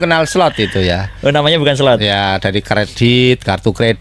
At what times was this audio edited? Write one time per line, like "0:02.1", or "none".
none